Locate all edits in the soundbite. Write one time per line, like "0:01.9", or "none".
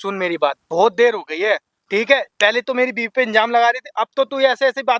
none